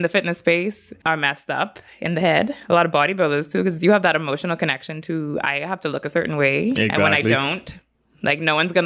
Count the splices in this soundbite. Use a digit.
1